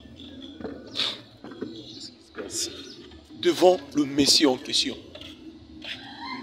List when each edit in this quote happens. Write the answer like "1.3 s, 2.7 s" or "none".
5.4 s